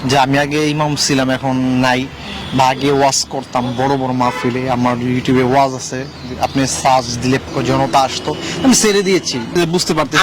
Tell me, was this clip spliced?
yes; 2 cuts; at 7.4 s, 9.5 s

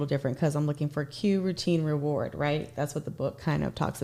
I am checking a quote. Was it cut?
no; 0 cuts

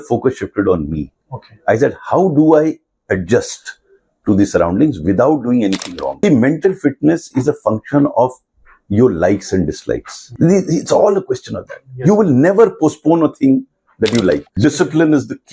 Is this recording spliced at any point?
yes; 2 cuts; at 6.1 s, 14.6 s

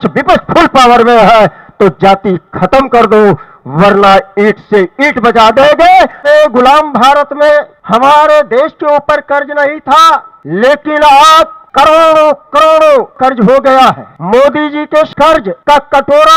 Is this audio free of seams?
no; 7 cuts; at 6.2 s, 7.8 s, 10.4 s, 11.6 s, 13.2 s, 14.1 s, 15.1 s

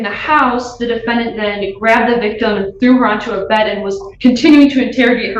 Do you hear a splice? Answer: no; 0 cuts

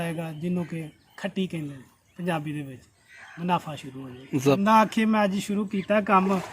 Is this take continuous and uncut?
no; 1 cut; at 4.6 s

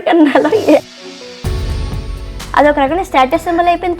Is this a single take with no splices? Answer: yes; 0 cuts

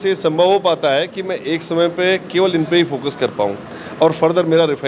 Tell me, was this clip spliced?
no; 0 cuts

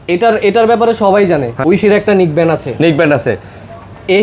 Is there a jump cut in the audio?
yes; 1 cut; at 1.6 s

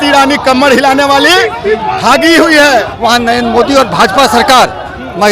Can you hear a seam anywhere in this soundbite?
yes; 1 cut; at 2.9 s

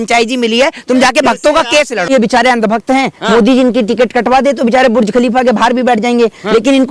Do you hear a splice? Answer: yes; 1 cut; at 2.1 s

